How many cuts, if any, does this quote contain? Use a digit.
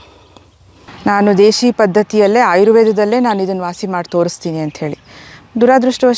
1